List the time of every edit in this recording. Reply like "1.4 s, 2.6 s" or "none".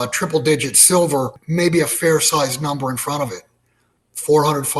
1.4 s

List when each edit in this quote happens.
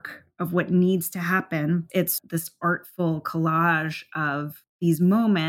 2.0 s

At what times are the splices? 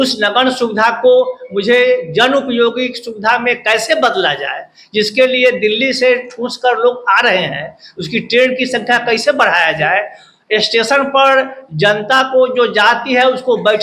none

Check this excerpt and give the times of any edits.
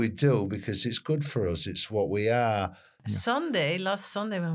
2.9 s

